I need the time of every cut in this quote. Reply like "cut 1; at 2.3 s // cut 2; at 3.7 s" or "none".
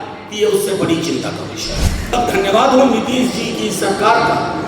cut 1; at 2.1 s